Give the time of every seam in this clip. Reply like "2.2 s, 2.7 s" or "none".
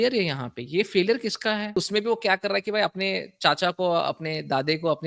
1.8 s